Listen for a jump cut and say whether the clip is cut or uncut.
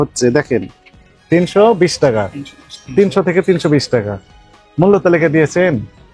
cut